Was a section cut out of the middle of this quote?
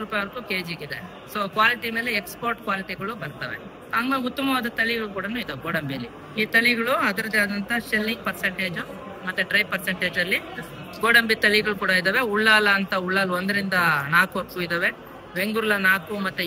no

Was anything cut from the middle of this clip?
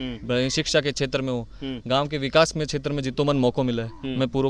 no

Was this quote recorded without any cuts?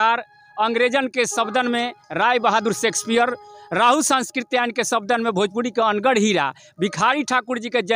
yes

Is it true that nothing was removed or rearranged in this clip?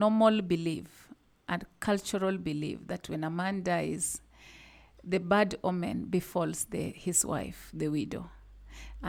yes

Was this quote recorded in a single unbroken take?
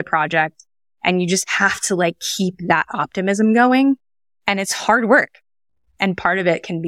no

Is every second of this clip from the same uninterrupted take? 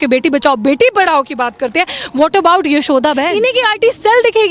no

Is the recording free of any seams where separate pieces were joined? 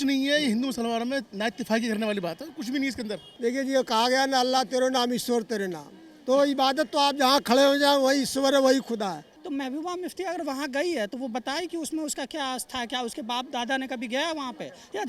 no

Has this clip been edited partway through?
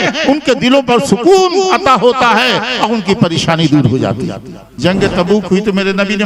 yes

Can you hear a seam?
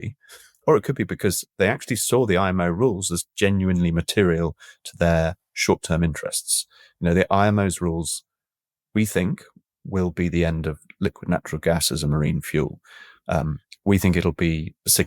no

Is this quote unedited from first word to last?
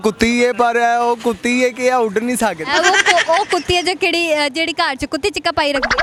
yes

